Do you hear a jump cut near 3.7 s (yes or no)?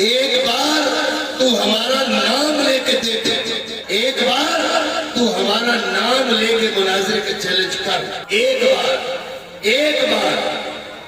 yes